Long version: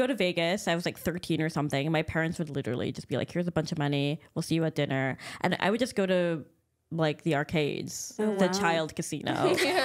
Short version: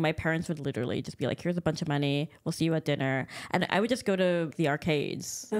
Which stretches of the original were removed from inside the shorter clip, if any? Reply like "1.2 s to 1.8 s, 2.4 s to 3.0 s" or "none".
6.4 s to 7.2 s